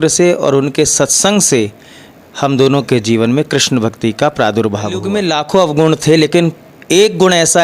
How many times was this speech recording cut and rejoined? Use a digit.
1